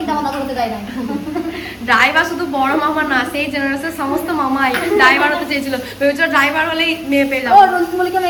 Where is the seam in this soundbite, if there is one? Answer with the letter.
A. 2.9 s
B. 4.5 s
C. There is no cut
C